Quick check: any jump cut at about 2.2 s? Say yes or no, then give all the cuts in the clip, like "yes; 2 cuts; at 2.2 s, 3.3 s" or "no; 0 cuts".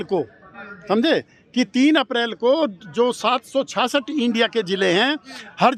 no; 0 cuts